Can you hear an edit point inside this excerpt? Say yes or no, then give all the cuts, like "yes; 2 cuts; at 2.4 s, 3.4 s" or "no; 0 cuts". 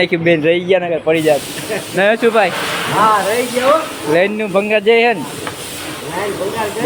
no; 0 cuts